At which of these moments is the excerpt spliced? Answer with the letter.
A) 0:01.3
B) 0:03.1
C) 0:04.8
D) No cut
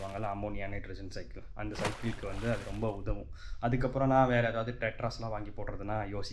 D